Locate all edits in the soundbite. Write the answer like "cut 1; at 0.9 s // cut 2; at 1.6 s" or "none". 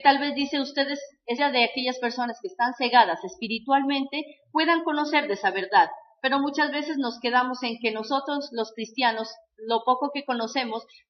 none

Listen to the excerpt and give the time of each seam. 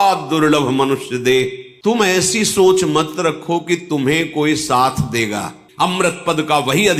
cut 1; at 1.7 s // cut 2; at 5.6 s

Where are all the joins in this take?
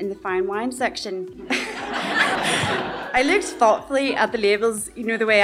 cut 1; at 1.4 s // cut 2; at 2.4 s

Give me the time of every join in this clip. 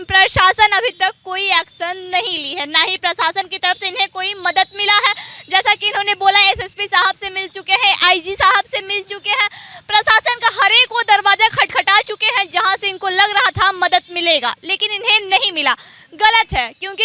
none

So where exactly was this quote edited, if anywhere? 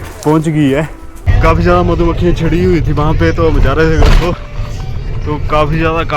cut 1; at 1.2 s

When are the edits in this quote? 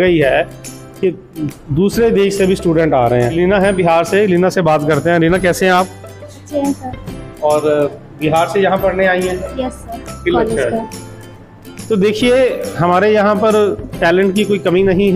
cut 1; at 3.3 s // cut 2; at 10.1 s

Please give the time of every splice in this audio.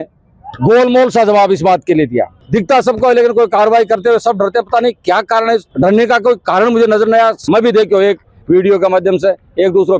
cut 1; at 2.4 s // cut 2; at 7.4 s

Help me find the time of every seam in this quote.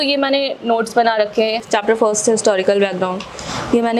cut 1; at 1.6 s

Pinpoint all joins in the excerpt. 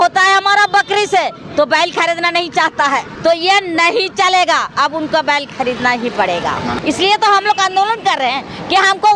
cut 1; at 3.1 s // cut 2; at 6.8 s

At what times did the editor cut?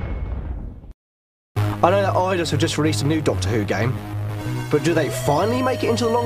cut 1; at 1.7 s

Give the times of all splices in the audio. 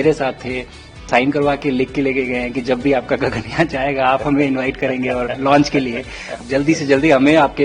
cut 1; at 1.0 s // cut 2; at 6.4 s

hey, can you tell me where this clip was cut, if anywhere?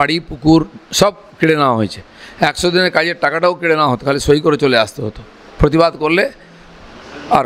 none

